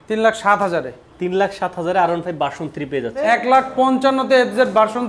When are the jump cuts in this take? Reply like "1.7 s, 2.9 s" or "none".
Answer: 3.2 s